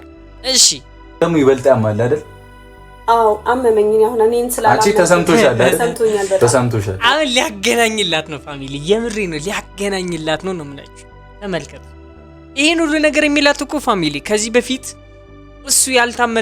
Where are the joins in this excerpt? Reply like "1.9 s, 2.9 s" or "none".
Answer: 1.1 s